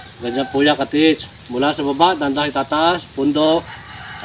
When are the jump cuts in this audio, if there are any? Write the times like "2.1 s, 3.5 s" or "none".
none